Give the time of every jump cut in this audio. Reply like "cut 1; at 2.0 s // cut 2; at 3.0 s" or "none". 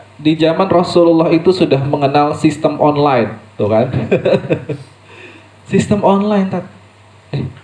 cut 1; at 3.4 s